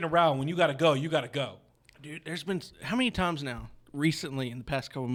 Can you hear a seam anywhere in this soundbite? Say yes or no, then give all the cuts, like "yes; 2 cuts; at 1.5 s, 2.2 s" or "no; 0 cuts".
no; 0 cuts